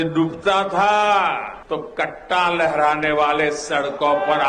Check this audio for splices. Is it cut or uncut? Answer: cut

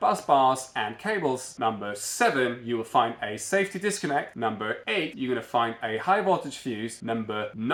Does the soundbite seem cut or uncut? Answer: uncut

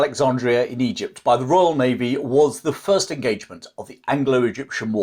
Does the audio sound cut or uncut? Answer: uncut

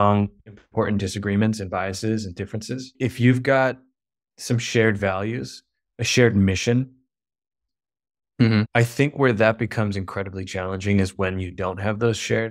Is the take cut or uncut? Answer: cut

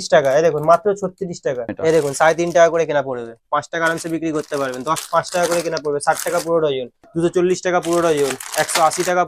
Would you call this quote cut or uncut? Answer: cut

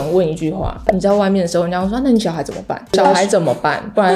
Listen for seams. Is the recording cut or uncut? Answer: cut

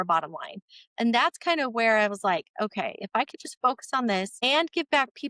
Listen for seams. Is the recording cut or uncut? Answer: cut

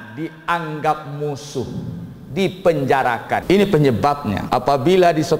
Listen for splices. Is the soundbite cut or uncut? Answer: cut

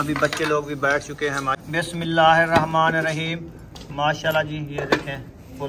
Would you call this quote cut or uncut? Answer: cut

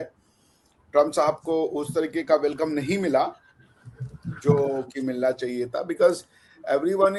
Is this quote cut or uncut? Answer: uncut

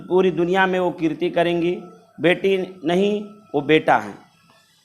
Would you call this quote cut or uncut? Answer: uncut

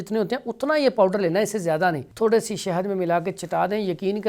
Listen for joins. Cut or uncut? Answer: cut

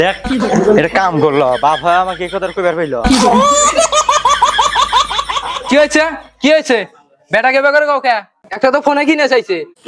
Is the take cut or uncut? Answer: uncut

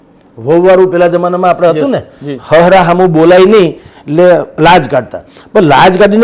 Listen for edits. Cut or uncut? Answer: uncut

